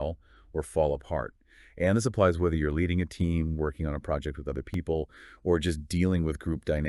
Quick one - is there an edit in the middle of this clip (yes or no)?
yes